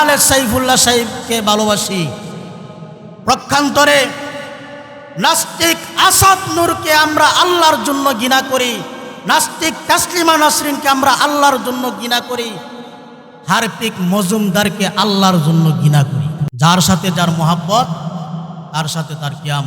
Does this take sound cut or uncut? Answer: cut